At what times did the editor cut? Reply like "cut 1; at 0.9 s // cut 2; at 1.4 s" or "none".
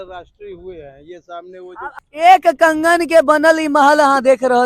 cut 1; at 1.9 s